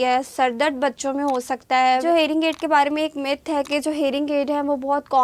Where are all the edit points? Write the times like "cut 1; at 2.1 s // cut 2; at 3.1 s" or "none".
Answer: cut 1; at 2.0 s